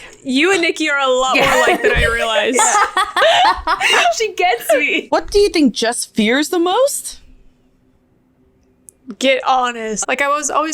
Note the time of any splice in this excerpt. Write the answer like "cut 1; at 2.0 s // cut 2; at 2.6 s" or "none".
cut 1; at 5.0 s // cut 2; at 10.0 s